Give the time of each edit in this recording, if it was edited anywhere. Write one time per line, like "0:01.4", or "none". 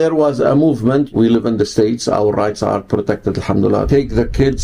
0:01.1
0:03.9